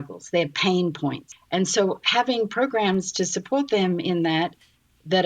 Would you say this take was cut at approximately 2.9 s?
no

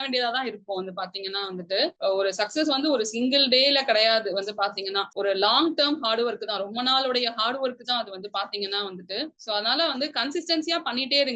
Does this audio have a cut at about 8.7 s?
no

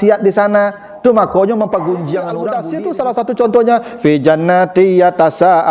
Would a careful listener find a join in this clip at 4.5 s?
no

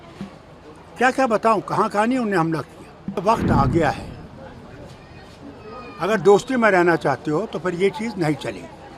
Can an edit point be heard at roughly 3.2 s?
yes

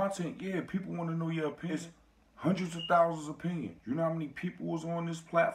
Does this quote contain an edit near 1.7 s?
yes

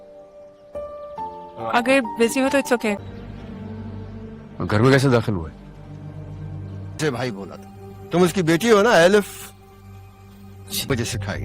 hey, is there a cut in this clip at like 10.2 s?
no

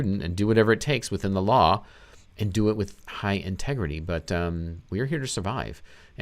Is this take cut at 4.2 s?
no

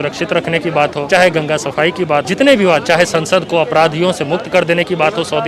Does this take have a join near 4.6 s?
no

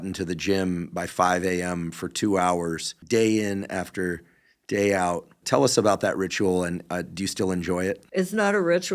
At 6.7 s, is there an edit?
no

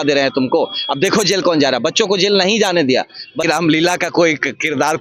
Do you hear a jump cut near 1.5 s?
no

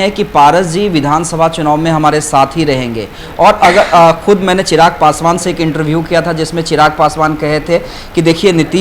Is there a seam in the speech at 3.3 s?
no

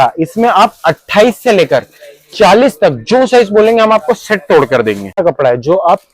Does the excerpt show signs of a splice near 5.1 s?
yes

